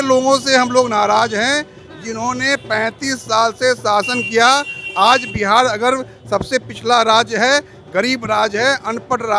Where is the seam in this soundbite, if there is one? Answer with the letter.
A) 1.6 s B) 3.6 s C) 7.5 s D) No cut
D